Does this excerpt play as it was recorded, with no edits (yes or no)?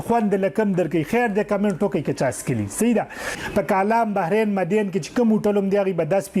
no